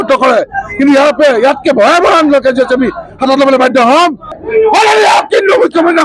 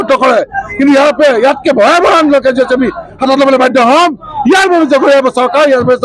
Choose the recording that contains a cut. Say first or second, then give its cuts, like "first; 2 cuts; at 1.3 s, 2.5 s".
first; 1 cut; at 4.3 s